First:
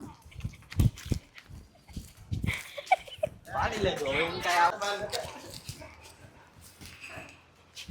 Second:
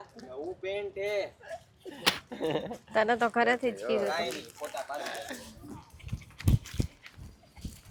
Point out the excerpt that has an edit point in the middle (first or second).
first